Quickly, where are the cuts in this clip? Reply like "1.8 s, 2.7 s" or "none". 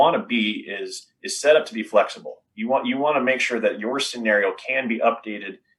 none